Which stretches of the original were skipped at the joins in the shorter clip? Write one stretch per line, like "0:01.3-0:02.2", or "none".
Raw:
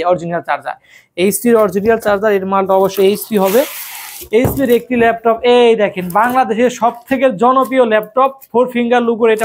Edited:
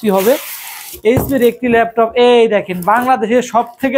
none